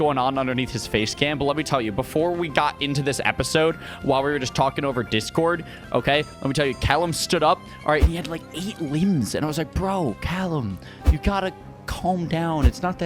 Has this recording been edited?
no; 0 cuts

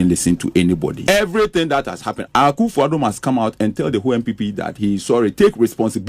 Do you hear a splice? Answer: yes; 2 cuts; at 0.9 s, 2.1 s

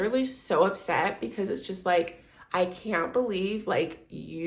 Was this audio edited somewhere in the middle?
no; 0 cuts

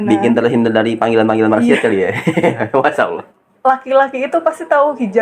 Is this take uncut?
no; 1 cut; at 3.3 s

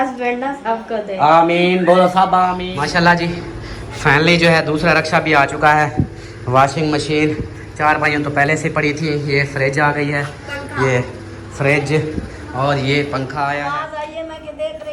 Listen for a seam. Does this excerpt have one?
yes; 2 cuts; at 2.7 s, 13.6 s

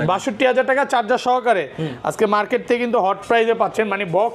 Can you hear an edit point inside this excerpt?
no; 0 cuts

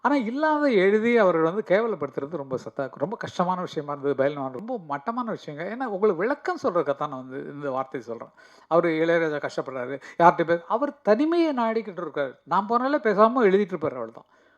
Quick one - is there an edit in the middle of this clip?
yes; 1 cut; at 4.6 s

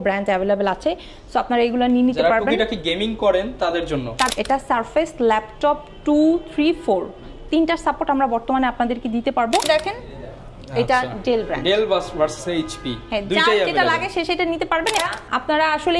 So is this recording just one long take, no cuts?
no; 3 cuts; at 4.3 s, 9.6 s, 15.0 s

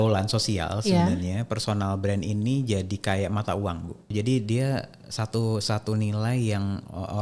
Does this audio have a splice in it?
yes; 1 cut; at 4.1 s

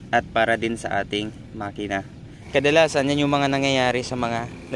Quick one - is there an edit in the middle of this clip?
yes; 1 cut; at 2.3 s

